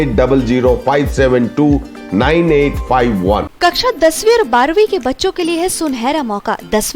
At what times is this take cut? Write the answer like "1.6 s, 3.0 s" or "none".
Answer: 3.5 s

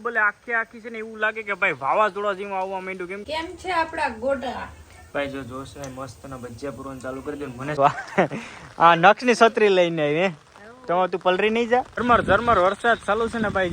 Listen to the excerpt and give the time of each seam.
3.2 s, 7.8 s, 11.9 s

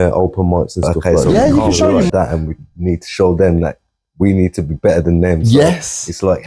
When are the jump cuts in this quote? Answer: 2.1 s

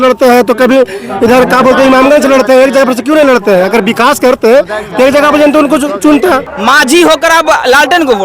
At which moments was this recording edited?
6.5 s

